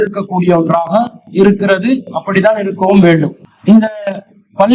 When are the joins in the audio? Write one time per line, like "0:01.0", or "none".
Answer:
0:03.5